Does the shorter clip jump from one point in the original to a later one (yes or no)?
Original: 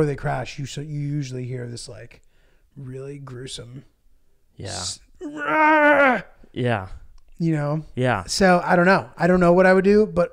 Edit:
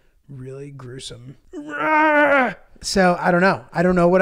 yes